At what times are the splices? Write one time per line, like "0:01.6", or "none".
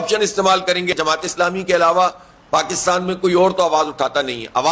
0:00.9

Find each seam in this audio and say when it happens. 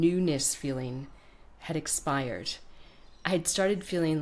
none

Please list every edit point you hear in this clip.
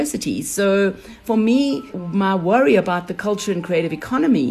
0:01.1
0:02.0

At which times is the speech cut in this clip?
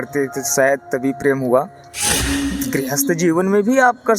0:02.1

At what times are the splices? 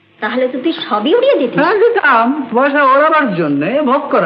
none

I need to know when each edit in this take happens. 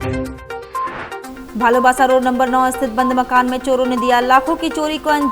0:01.3

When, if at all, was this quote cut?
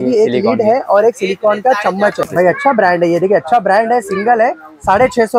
0:02.2

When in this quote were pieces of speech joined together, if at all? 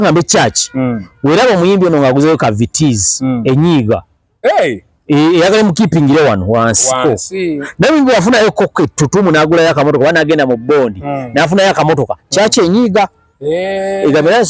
none

